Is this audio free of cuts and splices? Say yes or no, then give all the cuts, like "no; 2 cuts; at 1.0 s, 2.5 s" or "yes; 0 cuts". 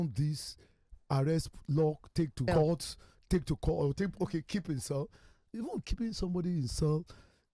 no; 1 cut; at 2.4 s